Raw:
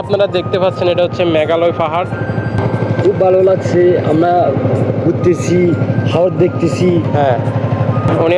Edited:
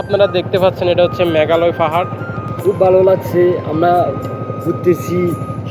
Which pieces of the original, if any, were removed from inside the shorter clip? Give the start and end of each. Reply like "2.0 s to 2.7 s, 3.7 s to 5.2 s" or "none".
2.5 s to 2.9 s